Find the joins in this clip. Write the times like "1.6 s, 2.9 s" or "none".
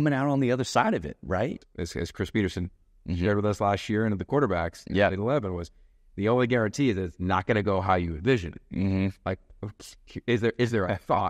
1.5 s